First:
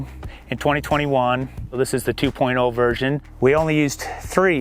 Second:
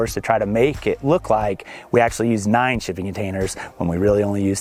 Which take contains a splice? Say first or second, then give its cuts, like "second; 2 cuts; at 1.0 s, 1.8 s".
first; 2 cuts; at 1.6 s, 3.3 s